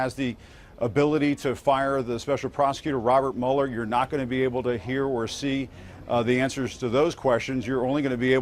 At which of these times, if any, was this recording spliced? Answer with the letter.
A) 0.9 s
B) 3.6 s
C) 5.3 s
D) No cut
A